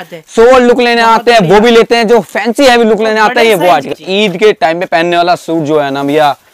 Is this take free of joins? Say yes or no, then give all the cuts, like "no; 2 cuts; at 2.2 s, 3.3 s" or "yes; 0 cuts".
no; 1 cut; at 4.0 s